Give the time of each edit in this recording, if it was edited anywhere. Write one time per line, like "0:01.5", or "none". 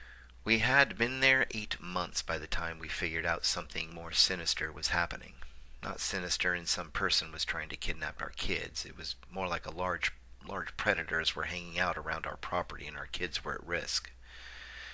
none

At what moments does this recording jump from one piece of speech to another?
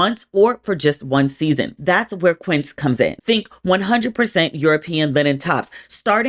0:03.2

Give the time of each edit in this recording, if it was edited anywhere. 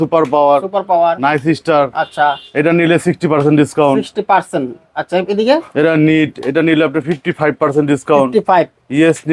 none

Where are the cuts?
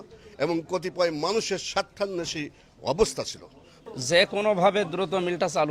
0:03.8

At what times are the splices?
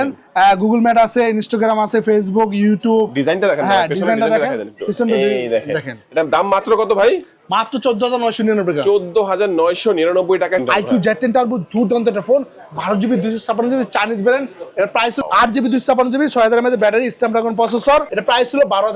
0:10.6
0:15.2
0:18.1

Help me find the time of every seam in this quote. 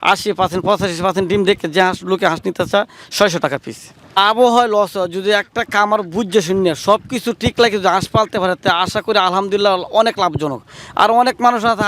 0:04.0

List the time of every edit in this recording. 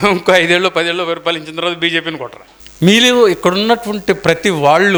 0:02.5

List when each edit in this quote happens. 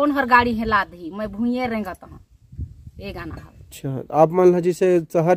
0:03.7

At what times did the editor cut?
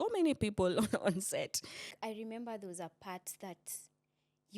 0:01.9

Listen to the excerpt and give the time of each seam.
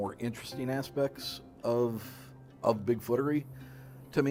none

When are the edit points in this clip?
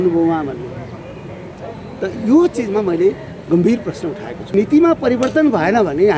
0:04.5

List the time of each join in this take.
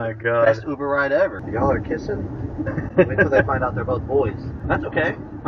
0:01.4
0:04.5

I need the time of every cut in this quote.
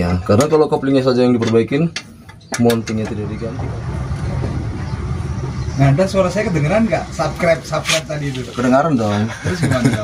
0:03.3

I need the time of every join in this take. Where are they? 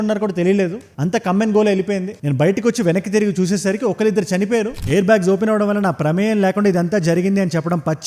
0:04.8

